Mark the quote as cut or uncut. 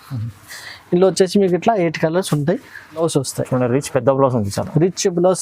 cut